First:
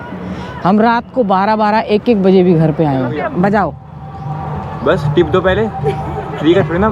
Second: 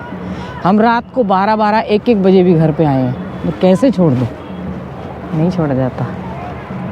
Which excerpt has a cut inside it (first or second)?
first